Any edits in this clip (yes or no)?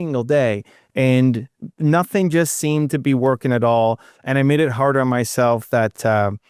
no